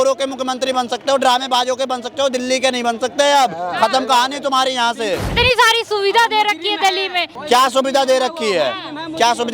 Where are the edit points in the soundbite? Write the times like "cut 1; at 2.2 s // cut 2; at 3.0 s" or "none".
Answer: cut 1; at 5.3 s // cut 2; at 7.3 s